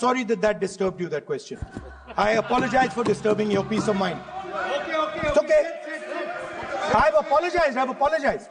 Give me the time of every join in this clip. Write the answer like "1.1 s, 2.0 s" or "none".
none